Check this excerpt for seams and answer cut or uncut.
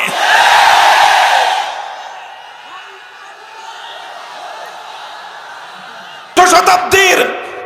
cut